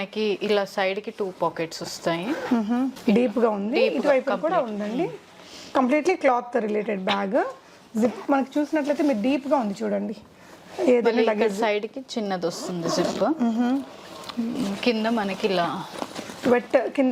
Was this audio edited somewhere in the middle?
no; 0 cuts

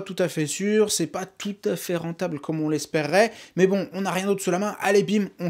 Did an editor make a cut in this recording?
no; 0 cuts

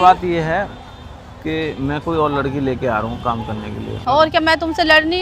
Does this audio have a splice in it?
yes; 1 cut; at 3.9 s

